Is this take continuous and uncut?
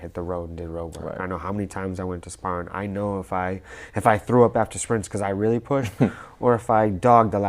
yes; 0 cuts

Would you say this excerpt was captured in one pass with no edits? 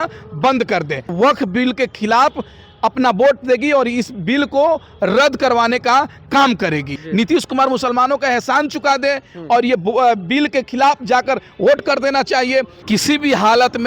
no; 3 cuts; at 1.1 s, 7.0 s, 12.8 s

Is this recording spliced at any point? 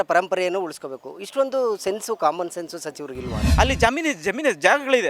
yes; 1 cut; at 3.4 s

